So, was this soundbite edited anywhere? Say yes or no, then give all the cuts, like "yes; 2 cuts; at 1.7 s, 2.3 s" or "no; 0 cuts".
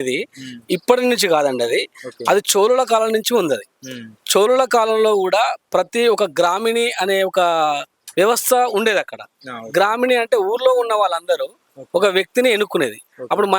no; 0 cuts